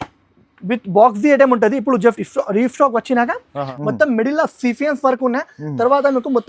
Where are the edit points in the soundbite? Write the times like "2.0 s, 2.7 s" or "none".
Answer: 3.7 s